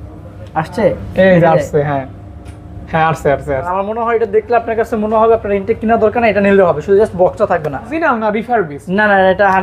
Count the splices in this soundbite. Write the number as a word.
two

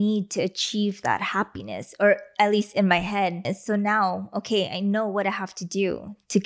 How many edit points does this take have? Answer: one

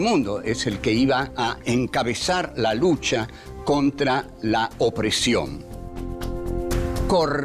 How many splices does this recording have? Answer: one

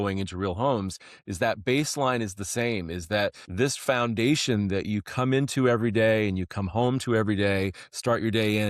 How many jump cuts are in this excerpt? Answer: one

